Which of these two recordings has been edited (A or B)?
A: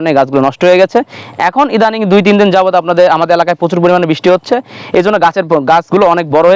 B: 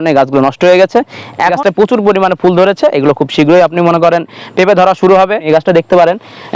B